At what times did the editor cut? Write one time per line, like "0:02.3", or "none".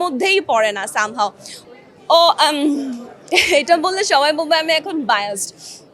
0:01.5